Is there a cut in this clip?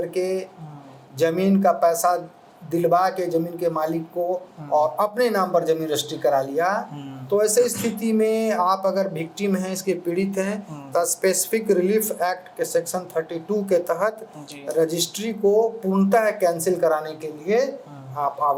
no; 0 cuts

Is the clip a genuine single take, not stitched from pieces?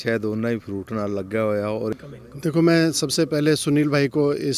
no; 1 cut; at 1.9 s

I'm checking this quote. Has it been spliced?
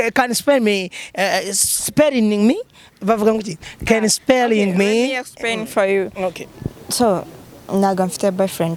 no; 0 cuts

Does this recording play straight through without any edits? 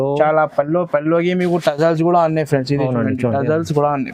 yes; 0 cuts

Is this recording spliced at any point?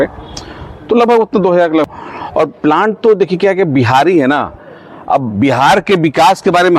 yes; 1 cut; at 1.9 s

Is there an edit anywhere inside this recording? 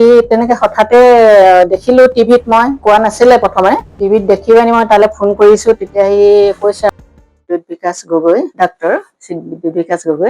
yes; 3 cuts; at 2.8 s, 3.9 s, 6.9 s

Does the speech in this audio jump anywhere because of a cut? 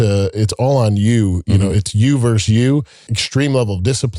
yes; 1 cut; at 3.1 s

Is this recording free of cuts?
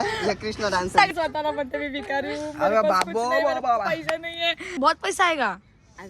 no; 2 cuts; at 1.1 s, 4.8 s

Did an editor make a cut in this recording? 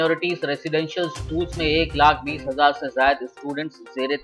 no; 0 cuts

